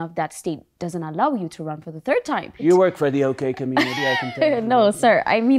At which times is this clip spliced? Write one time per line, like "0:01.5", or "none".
0:02.6